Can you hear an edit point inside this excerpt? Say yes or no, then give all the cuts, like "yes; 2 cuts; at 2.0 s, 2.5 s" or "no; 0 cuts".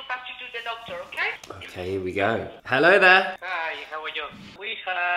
no; 0 cuts